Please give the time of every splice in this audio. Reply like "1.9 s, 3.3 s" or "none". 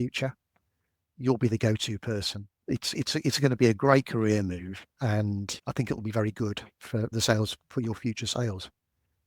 5.6 s, 7.1 s